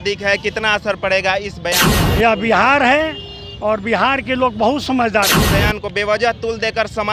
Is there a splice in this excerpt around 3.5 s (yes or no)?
no